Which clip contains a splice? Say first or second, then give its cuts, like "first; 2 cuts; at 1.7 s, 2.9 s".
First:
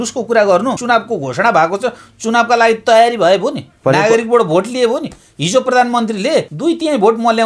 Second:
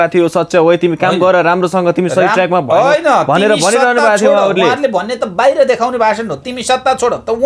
first; 2 cuts; at 0.8 s, 6.5 s